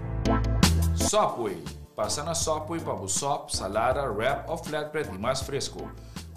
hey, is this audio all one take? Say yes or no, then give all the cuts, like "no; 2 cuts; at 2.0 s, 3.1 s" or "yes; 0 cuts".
no; 1 cut; at 1.1 s